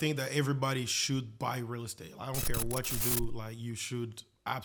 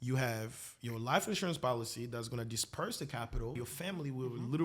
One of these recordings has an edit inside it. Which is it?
second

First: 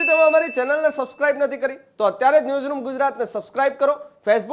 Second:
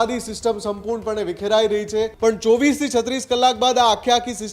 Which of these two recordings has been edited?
second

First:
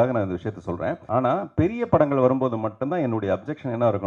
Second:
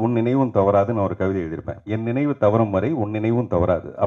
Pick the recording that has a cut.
first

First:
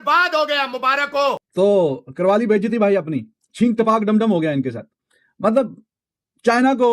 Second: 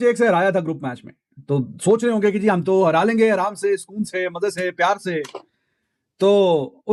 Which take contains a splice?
first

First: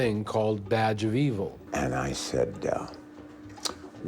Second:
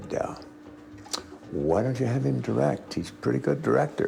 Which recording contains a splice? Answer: first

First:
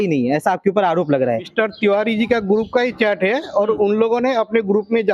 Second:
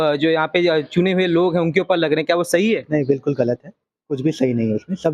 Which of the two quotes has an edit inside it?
first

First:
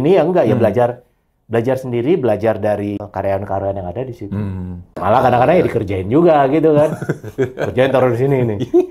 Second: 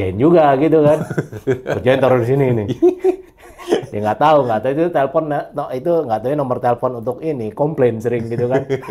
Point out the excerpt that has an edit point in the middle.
first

